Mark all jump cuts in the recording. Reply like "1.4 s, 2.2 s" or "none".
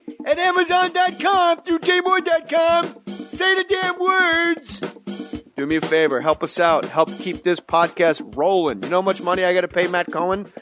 2.2 s